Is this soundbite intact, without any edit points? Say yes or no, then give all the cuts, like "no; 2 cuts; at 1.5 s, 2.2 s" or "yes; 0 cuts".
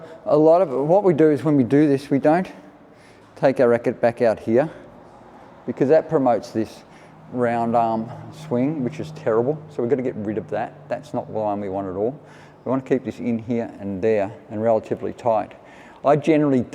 yes; 0 cuts